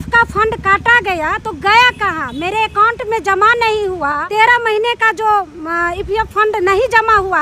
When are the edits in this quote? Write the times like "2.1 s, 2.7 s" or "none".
4.2 s